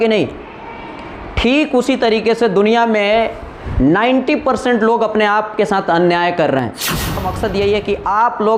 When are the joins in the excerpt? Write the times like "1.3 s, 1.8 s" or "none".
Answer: 7.3 s